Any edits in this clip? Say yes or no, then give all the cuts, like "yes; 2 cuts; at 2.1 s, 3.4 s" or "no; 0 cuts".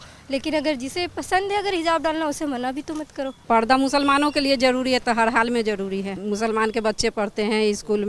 yes; 2 cuts; at 3.4 s, 6.2 s